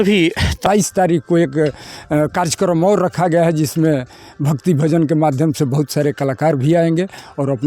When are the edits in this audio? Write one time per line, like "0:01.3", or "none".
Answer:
0:01.0